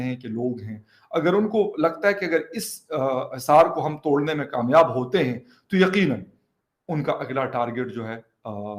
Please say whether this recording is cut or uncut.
uncut